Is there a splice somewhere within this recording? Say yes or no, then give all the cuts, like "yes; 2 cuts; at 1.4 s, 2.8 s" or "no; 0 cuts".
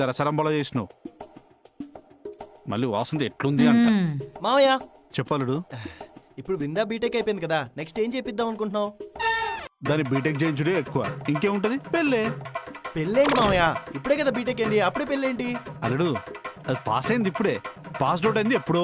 no; 0 cuts